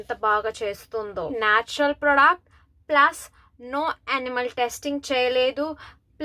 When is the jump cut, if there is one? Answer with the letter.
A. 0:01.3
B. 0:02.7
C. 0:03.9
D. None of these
A